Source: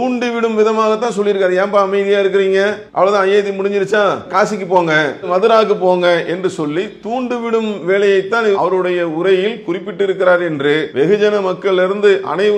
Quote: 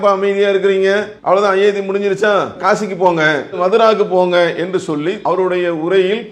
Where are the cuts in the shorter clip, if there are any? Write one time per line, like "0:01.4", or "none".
0:05.2

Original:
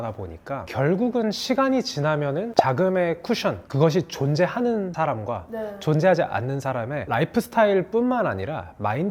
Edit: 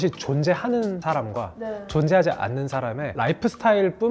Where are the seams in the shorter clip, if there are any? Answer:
none

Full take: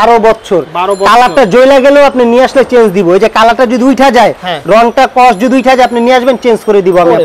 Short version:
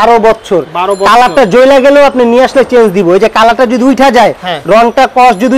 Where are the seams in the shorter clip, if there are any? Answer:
none

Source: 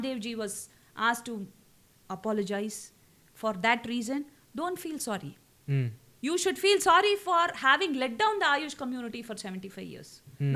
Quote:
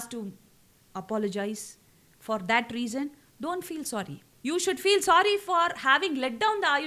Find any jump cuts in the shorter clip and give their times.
0:04.2

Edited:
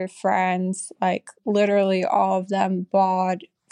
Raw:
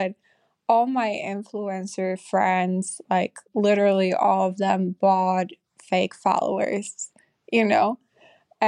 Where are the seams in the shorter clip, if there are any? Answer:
none

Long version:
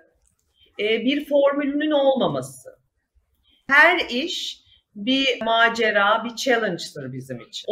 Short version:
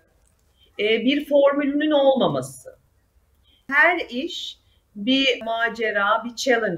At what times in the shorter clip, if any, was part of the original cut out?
none

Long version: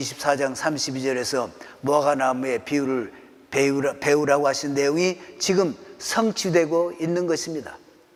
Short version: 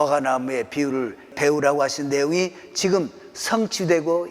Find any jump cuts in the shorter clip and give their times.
0:01.3

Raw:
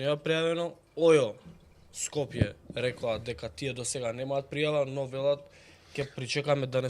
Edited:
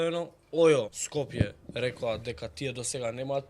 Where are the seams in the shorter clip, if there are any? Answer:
0:01.0

